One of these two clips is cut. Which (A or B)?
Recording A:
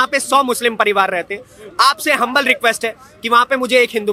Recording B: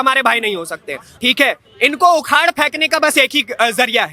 B